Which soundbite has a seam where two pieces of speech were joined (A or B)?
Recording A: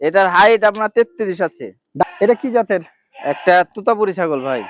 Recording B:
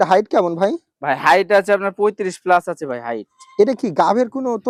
A